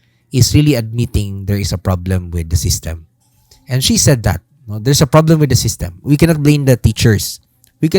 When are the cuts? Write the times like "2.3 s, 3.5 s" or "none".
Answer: none